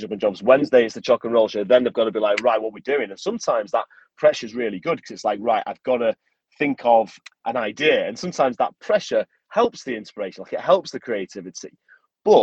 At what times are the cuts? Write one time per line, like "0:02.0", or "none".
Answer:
0:07.2